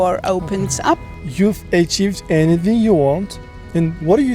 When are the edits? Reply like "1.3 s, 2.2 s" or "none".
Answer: 1.1 s